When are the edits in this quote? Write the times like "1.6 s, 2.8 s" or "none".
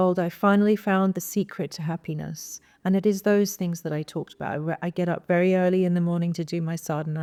none